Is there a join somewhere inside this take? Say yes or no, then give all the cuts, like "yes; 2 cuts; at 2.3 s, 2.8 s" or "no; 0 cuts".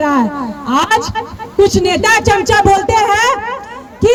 no; 0 cuts